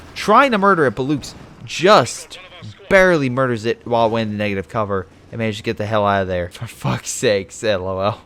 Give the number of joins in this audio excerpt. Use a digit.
1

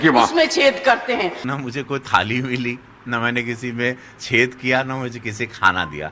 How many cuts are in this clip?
1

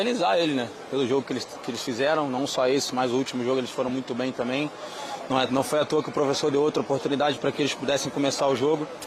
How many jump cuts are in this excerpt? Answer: 0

